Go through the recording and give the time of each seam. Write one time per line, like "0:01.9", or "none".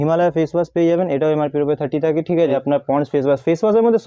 0:02.5

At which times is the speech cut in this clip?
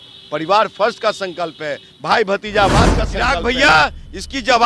0:03.2

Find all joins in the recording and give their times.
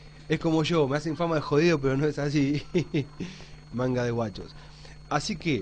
0:02.8

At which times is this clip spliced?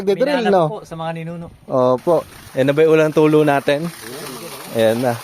0:02.4

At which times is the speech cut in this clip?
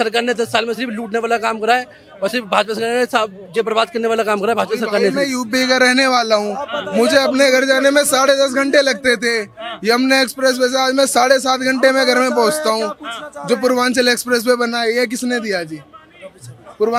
none

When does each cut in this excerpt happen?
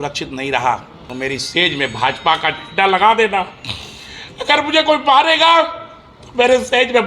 0:01.0

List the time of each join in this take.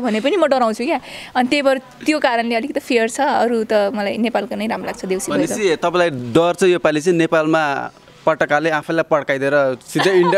none

